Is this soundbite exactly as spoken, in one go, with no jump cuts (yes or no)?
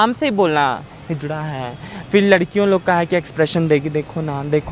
yes